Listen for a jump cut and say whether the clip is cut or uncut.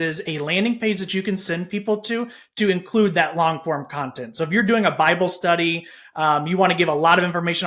uncut